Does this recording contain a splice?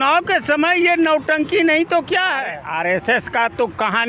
yes; 1 cut; at 2.6 s

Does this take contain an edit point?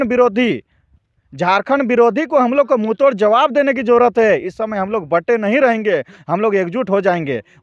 no; 0 cuts

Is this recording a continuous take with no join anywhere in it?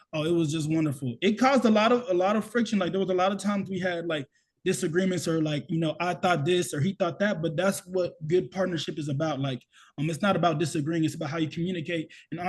yes; 0 cuts

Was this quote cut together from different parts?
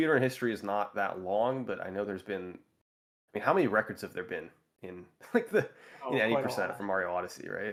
no; 0 cuts

